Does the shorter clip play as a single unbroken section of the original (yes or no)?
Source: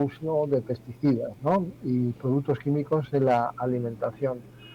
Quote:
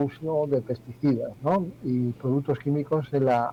yes